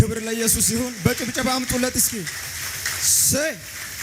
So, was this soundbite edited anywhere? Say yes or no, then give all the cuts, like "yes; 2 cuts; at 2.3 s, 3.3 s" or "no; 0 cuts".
no; 0 cuts